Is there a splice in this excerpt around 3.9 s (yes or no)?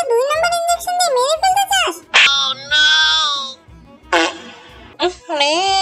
no